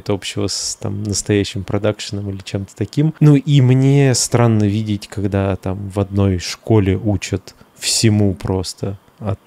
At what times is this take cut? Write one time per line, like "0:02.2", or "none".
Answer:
none